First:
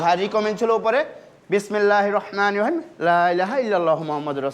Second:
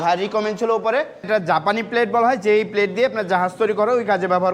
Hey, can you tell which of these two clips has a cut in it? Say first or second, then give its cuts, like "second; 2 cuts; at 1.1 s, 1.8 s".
second; 1 cut; at 1.3 s